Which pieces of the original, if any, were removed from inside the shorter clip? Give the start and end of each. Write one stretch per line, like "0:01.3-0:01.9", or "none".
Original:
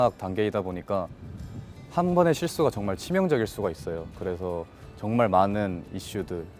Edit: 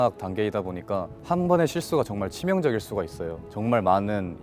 0:01.1-0:01.8
0:04.1-0:04.9